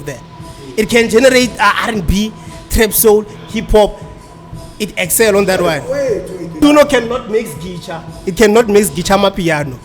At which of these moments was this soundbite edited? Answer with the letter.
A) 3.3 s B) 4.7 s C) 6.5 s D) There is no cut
C